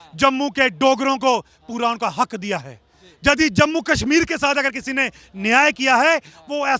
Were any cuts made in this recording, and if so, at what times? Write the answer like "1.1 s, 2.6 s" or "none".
none